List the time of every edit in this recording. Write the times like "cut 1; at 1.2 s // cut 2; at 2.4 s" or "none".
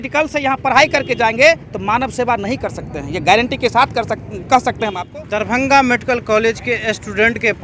cut 1; at 5.0 s